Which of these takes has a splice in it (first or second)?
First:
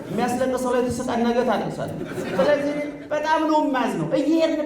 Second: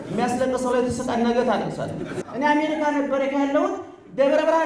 second